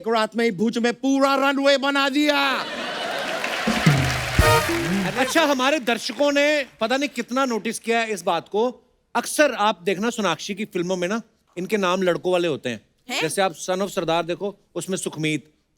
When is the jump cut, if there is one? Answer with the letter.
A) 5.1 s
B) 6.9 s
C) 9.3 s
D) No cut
A